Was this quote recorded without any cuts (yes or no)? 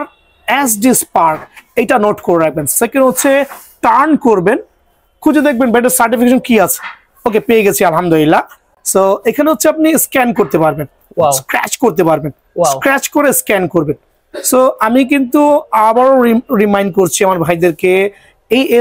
yes